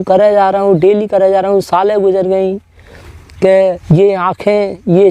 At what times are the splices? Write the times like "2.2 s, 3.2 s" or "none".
3.8 s